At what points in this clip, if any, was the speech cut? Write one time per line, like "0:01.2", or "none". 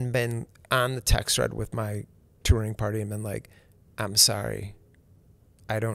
none